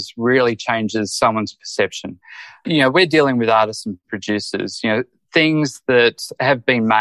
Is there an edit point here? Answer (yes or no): no